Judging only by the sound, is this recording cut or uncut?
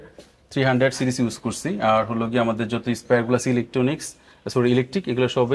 uncut